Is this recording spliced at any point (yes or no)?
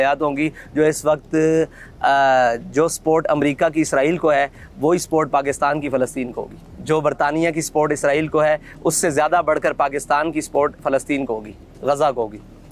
no